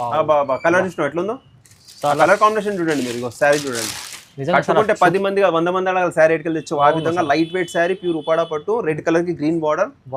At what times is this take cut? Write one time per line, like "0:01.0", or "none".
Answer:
none

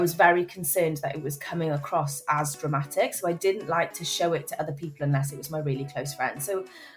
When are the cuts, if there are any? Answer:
none

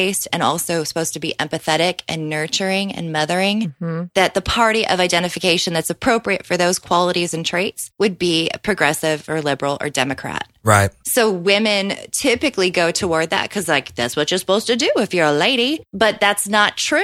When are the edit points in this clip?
0:07.8
0:16.0

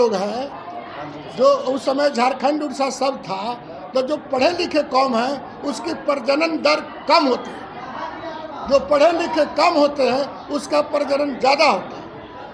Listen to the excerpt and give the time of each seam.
none

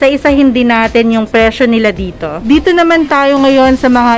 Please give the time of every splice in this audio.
0:02.3

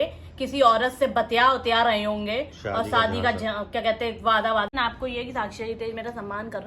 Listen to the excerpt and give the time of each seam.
0:04.7

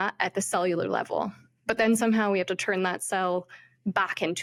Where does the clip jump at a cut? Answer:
none

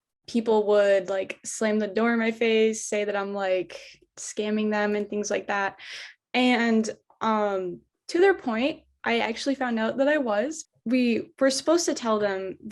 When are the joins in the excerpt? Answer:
0:10.6

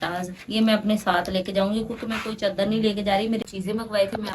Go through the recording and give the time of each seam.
0:03.4

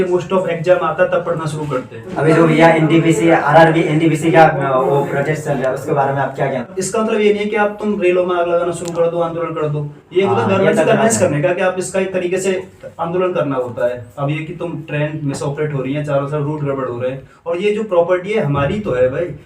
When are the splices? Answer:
0:02.0
0:06.7

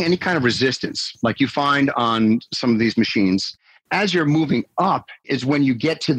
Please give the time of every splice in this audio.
0:03.5
0:05.2

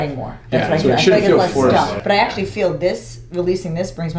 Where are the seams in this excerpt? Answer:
0:02.0

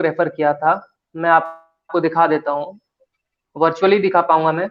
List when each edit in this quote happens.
none

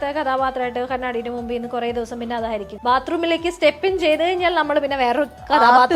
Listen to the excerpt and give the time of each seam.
0:02.7

